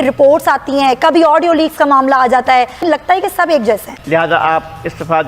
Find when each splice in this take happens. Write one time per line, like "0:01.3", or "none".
0:03.9